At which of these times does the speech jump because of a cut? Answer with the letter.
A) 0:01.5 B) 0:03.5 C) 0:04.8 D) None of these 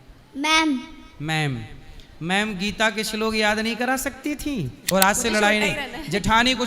C